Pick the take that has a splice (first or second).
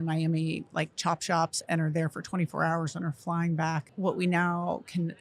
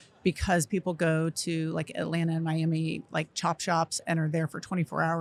first